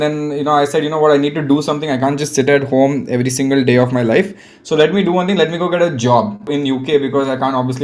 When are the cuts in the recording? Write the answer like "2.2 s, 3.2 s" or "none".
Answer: 6.5 s